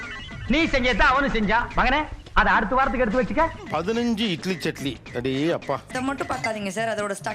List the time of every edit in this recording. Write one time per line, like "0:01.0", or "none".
0:03.5
0:05.7